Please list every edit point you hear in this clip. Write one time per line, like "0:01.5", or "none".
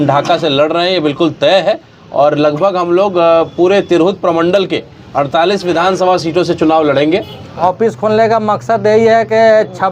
0:07.6